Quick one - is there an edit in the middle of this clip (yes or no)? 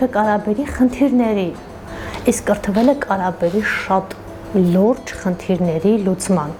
no